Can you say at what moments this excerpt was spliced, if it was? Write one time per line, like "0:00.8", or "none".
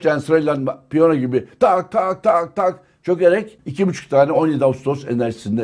0:03.6